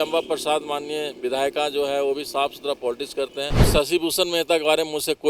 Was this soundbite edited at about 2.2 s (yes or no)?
no